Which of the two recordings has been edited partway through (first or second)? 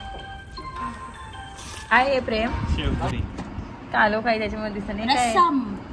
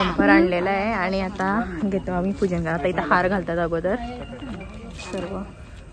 first